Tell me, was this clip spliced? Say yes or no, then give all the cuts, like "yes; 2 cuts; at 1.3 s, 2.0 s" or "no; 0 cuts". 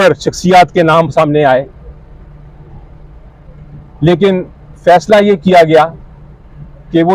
no; 0 cuts